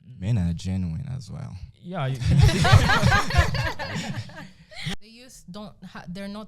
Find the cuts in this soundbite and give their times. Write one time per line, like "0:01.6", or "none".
0:04.9

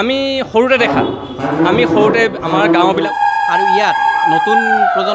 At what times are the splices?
0:03.1

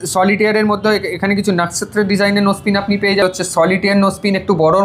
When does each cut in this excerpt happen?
0:03.2

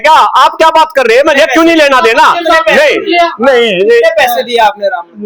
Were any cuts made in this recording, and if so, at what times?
none

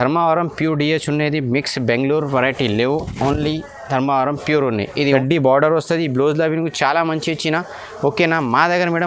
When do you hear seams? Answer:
0:05.0

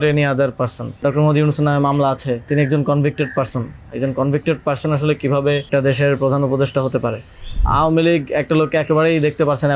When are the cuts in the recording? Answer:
0:01.0
0:02.5
0:05.7
0:07.6

